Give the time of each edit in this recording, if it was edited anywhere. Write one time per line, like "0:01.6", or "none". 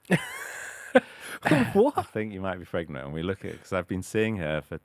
none